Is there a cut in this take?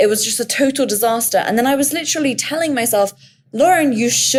no; 0 cuts

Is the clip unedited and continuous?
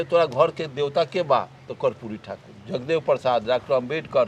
yes; 0 cuts

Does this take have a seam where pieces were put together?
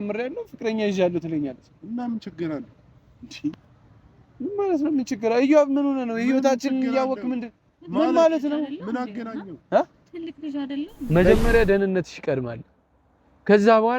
yes; 1 cut; at 11.1 s

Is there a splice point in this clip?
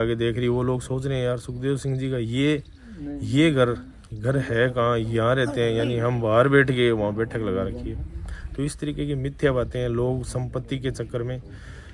no; 0 cuts

